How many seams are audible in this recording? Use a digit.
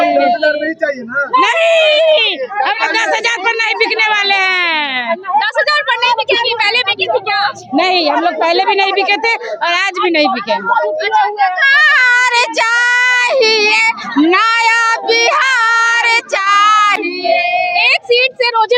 0